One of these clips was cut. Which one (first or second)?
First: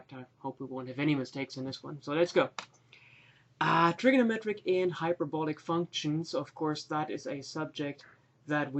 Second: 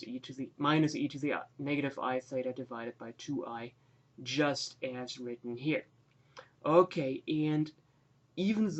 first